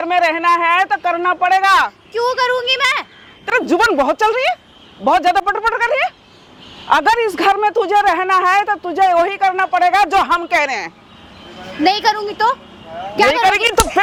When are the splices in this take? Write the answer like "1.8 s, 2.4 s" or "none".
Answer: none